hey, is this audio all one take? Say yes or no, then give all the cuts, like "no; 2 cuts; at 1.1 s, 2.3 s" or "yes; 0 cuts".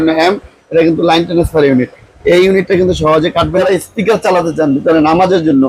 no; 1 cut; at 3.6 s